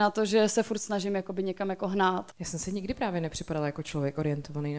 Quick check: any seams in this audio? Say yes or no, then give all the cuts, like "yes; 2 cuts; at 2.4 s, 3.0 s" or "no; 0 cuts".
yes; 1 cut; at 2.3 s